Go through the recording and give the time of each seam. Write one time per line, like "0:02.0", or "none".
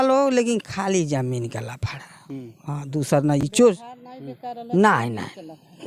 none